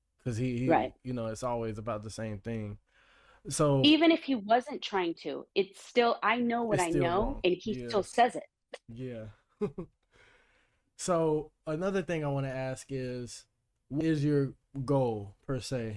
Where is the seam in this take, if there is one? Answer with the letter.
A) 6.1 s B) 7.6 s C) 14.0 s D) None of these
C